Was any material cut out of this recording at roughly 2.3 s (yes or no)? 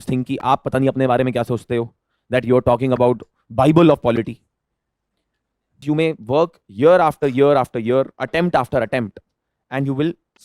no